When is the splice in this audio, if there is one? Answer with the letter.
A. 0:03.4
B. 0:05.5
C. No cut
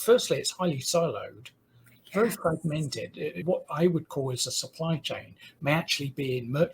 A